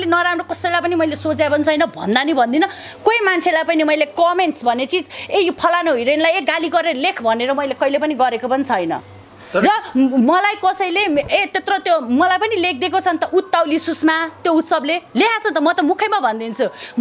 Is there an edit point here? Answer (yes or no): no